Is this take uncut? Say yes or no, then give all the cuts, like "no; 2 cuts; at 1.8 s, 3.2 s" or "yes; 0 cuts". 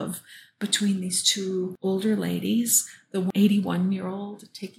no; 2 cuts; at 1.7 s, 3.3 s